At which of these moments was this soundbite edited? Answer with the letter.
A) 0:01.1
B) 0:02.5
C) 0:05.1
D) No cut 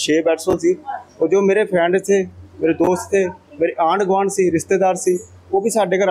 D